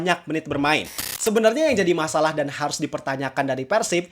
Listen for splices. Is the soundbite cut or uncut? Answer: cut